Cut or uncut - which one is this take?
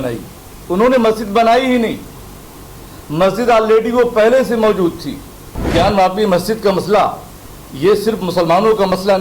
cut